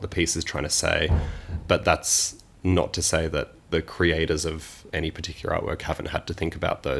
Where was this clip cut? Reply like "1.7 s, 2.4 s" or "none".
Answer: 1.6 s, 3.6 s, 4.7 s